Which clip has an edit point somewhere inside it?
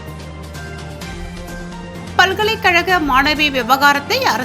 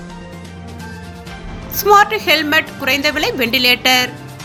first; 1 cut; at 2.0 s

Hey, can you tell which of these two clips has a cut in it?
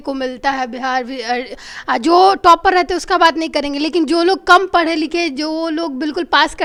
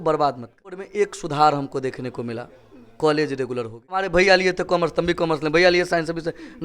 second; 2 cuts; at 0.8 s, 4.1 s

